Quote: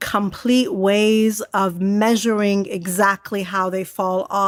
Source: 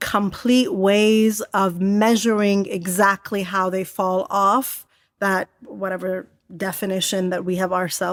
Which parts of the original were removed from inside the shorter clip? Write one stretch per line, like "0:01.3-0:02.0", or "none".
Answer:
none